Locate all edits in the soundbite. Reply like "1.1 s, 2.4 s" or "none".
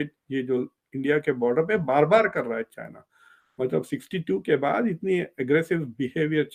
none